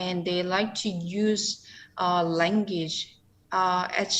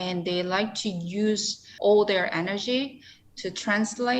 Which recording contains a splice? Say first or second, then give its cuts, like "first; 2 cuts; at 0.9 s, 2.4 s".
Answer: second; 1 cut; at 1.7 s